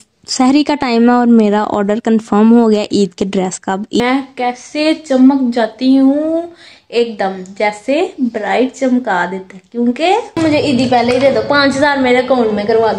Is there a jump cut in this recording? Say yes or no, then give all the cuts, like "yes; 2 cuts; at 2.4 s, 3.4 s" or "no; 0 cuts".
yes; 2 cuts; at 4.0 s, 10.4 s